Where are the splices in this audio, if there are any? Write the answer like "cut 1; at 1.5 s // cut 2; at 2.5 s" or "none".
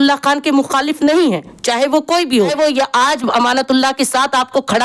cut 1; at 2.3 s

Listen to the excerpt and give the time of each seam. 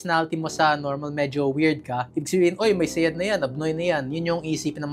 none

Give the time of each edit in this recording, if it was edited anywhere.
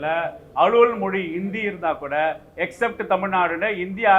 none

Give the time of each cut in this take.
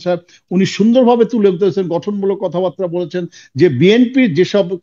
none

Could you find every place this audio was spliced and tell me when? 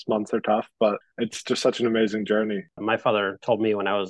cut 1; at 1.1 s // cut 2; at 2.7 s

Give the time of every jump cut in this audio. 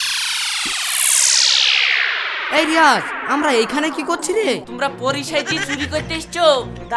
cut 1; at 4.7 s

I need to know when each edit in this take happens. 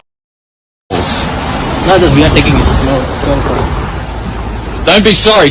none

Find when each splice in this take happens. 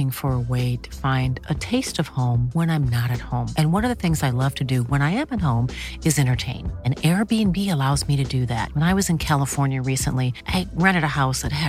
none

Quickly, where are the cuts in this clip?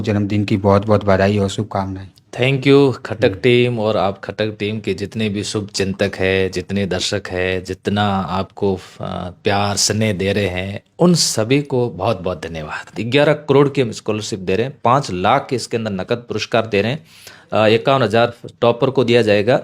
cut 1; at 13.0 s

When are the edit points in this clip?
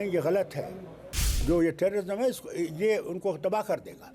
cut 1; at 1.3 s

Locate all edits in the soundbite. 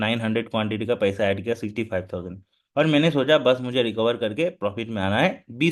none

